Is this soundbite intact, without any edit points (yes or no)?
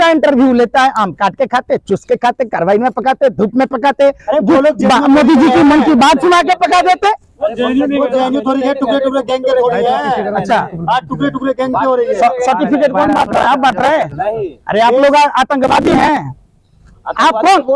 yes